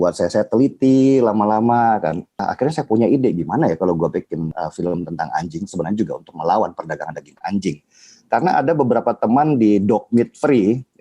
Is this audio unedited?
no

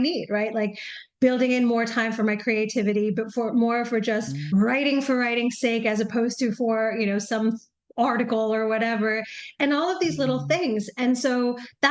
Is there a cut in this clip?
no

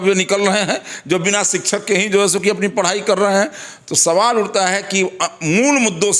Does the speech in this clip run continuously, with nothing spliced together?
yes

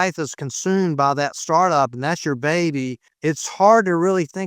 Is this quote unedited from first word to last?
no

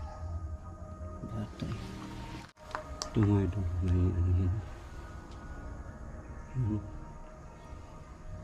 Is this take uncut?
no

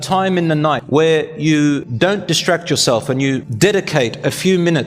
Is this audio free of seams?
no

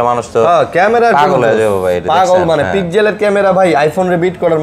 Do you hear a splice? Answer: no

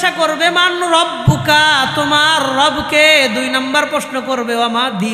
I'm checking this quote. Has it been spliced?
no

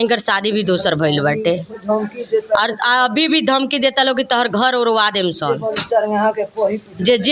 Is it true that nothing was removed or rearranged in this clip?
yes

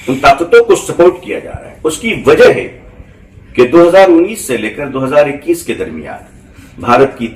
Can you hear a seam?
no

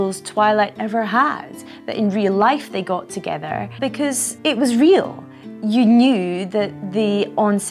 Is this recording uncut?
no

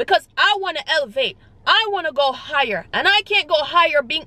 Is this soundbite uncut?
yes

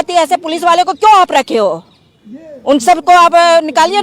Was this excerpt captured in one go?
yes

